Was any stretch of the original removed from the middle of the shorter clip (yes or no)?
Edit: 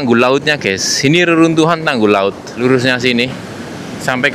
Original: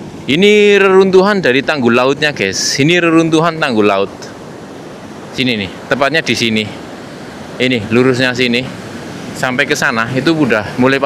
yes